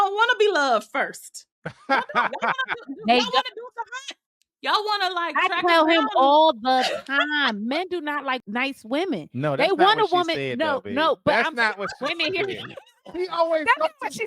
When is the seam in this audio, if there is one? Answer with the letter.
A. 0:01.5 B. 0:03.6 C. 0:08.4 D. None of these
C